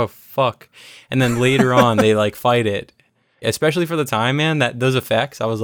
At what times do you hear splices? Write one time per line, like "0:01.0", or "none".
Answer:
0:03.4